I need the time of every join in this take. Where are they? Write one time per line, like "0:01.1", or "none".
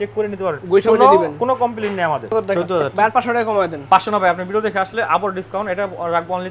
0:02.3